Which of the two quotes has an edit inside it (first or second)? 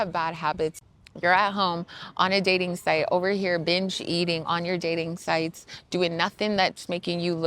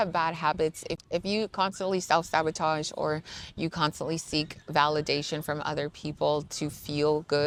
first